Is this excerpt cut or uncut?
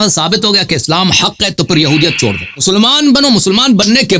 uncut